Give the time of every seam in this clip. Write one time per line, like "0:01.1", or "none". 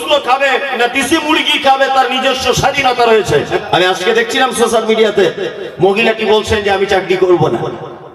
0:03.6

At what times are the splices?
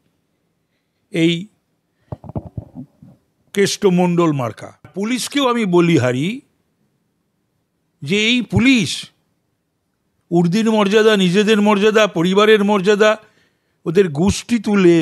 0:04.9

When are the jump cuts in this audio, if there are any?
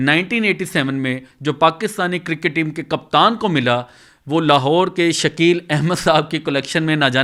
none

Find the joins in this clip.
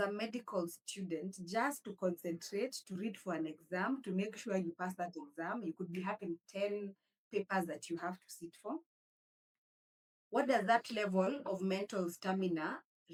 none

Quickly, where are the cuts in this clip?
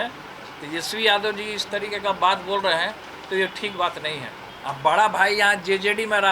0:04.4

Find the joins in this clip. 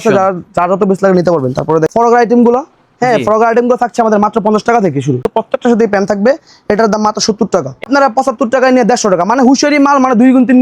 0:01.9
0:05.3
0:07.9

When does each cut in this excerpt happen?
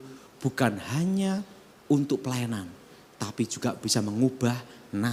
none

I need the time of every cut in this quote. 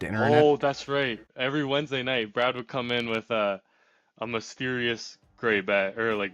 0:01.3

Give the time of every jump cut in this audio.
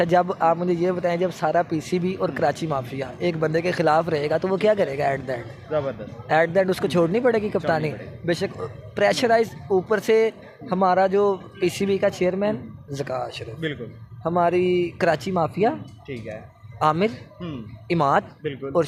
none

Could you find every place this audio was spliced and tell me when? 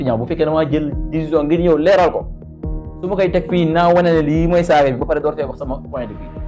none

